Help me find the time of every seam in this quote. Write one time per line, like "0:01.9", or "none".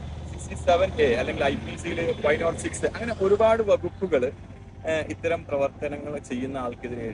none

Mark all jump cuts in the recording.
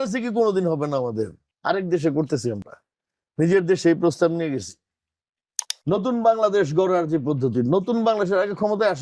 0:01.4
0:05.7

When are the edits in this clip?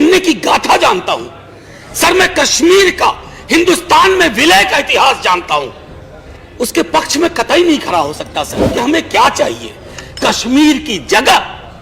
0:06.3
0:08.6

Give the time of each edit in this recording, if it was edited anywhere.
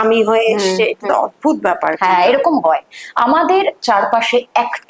none

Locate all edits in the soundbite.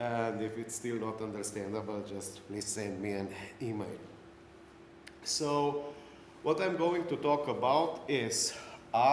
none

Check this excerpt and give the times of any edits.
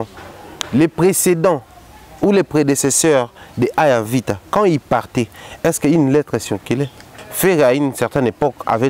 0:07.2

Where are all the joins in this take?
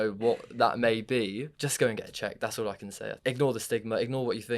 0:01.6
0:03.1

